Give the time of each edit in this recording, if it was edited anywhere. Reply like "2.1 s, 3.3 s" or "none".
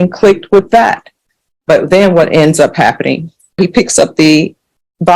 3.6 s